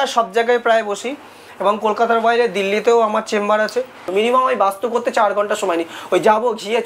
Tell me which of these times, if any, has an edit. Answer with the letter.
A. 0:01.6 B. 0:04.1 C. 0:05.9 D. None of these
B